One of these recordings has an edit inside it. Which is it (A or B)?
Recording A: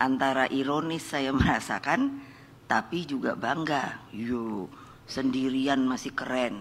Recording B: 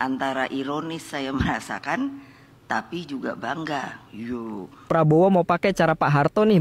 B